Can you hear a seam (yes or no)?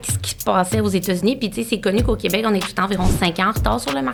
no